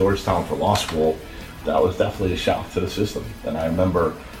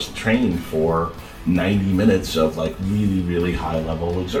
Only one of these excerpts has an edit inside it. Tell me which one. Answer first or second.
first